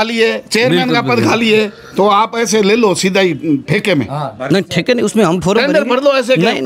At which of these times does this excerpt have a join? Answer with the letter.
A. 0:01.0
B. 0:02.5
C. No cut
C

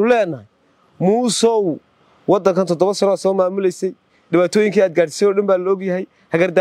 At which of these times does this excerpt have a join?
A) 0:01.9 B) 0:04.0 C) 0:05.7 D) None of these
D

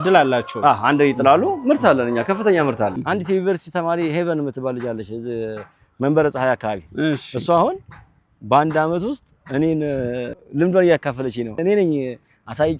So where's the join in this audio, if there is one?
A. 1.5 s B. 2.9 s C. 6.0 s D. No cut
B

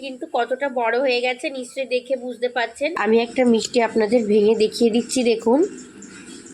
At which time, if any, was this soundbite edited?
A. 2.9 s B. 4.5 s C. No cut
A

